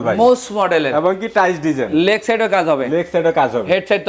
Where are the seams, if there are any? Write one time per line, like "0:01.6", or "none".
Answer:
none